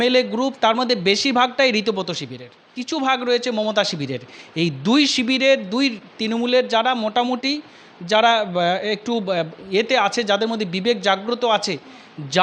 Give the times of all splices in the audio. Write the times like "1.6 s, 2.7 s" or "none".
2.8 s